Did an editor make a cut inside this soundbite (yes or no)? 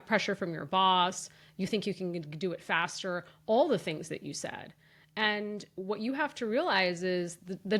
no